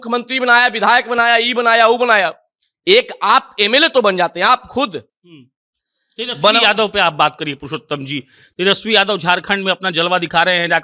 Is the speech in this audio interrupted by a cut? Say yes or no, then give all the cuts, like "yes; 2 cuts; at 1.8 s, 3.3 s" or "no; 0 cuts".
no; 0 cuts